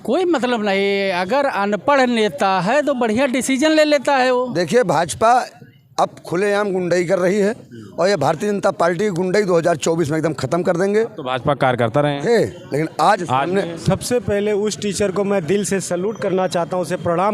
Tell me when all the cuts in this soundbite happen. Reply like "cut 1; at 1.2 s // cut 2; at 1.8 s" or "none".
cut 1; at 4.5 s // cut 2; at 13.8 s